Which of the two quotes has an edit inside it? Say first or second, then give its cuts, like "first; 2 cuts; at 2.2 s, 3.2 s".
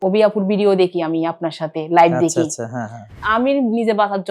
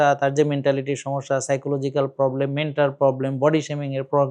first; 1 cut; at 3.2 s